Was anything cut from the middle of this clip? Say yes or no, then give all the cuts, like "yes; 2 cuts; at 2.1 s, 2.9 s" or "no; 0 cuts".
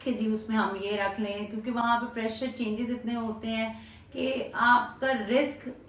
no; 0 cuts